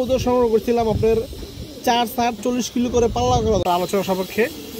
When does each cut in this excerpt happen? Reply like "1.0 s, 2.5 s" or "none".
3.6 s